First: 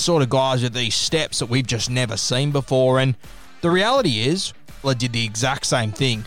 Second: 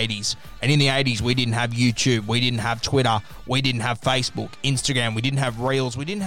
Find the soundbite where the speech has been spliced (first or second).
first